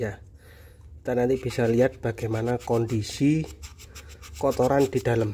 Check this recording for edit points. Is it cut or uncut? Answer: uncut